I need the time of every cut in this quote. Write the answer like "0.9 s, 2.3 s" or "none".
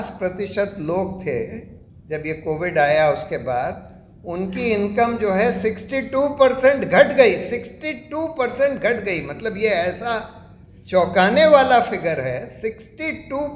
none

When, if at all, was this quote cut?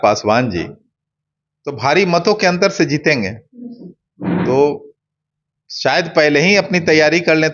none

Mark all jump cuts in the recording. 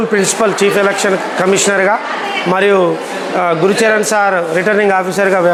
none

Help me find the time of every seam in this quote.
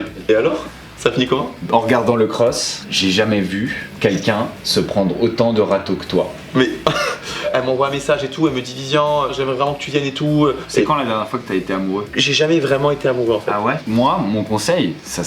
1.6 s, 7.4 s, 10.6 s, 13.8 s

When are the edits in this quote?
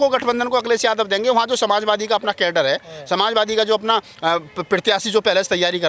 none

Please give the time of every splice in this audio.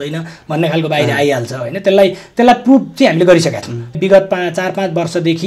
3.9 s

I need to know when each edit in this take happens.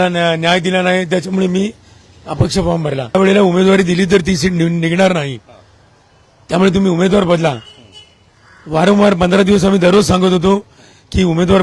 3.1 s

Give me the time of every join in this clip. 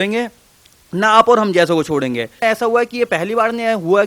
2.3 s

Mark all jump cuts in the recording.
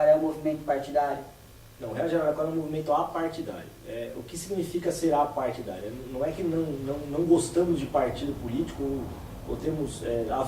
6.9 s

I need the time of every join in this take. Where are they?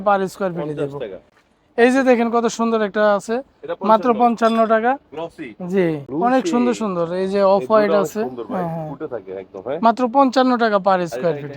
1.3 s, 6.0 s

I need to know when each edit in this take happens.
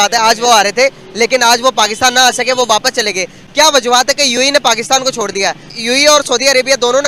none

